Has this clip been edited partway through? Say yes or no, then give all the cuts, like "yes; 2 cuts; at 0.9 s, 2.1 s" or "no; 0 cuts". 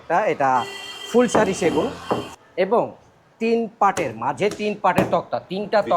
yes; 1 cut; at 2.3 s